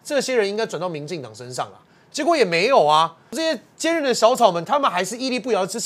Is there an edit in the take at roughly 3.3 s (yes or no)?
yes